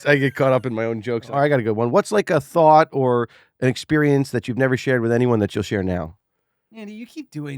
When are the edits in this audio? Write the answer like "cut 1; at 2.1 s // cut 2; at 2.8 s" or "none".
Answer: cut 1; at 1.3 s

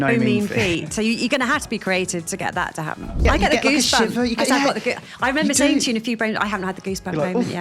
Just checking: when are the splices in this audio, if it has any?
cut 1; at 3.1 s

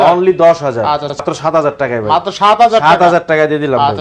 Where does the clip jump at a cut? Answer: cut 1; at 1.2 s

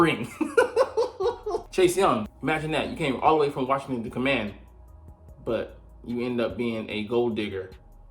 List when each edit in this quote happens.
cut 1; at 1.7 s // cut 2; at 2.3 s

